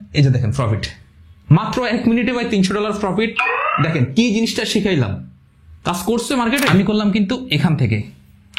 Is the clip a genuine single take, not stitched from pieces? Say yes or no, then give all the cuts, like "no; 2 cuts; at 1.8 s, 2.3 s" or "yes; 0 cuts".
no; 1 cut; at 6.7 s